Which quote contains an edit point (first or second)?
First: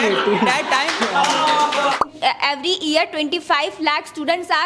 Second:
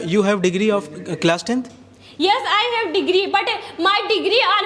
first